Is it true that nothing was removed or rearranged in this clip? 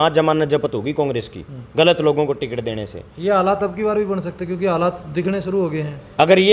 yes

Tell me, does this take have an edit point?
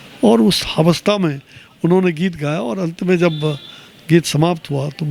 no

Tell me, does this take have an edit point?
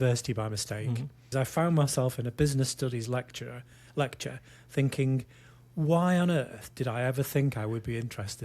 yes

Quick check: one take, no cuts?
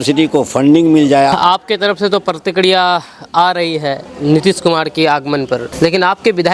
no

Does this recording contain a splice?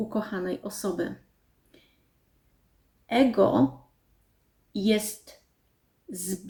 no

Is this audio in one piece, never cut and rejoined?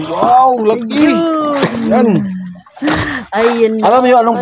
yes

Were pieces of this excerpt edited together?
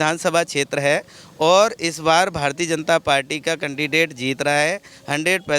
no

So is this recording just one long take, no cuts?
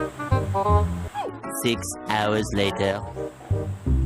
yes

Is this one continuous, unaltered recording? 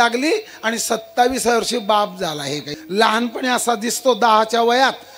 no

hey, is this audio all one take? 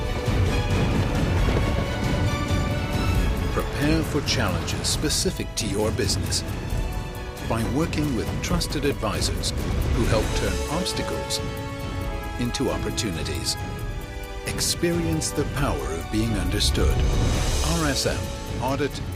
yes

